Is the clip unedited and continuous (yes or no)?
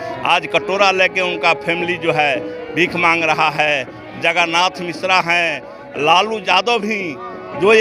yes